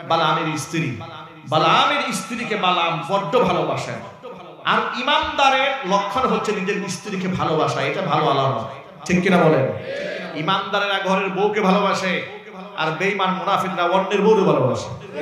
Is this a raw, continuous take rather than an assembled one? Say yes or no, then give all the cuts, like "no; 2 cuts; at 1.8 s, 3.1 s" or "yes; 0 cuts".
yes; 0 cuts